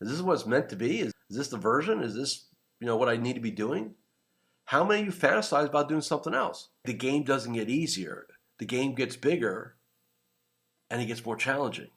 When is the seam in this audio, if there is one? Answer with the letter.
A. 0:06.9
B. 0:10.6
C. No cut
A